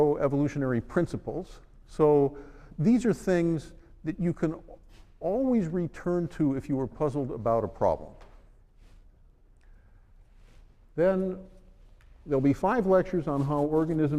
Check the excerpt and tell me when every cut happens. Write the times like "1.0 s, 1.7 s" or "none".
3.0 s